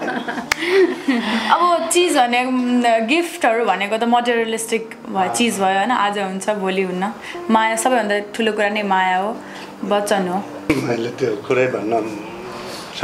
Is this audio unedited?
no; 1 cut; at 10.6 s

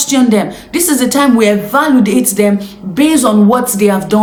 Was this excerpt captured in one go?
yes; 0 cuts

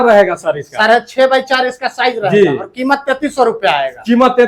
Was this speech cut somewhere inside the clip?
no; 0 cuts

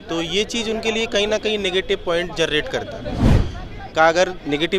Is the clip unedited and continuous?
no; 1 cut; at 3.4 s

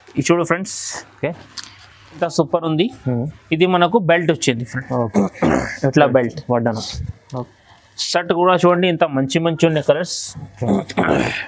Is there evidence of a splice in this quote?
yes; 1 cut; at 2.2 s

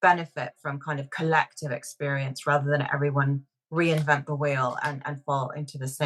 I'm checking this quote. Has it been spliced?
no; 0 cuts

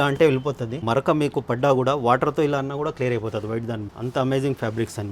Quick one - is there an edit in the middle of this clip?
yes; 2 cuts; at 0.8 s, 3.9 s

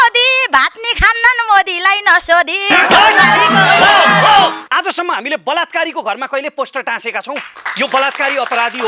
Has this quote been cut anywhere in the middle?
yes; 1 cut; at 4.6 s

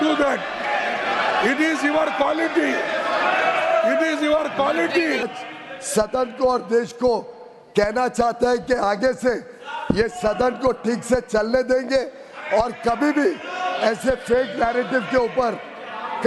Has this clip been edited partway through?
yes; 1 cut; at 5.3 s

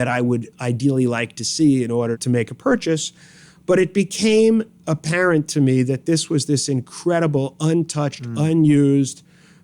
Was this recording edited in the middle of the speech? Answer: yes; 1 cut; at 2.2 s

